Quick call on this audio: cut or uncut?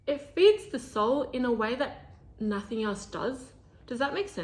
uncut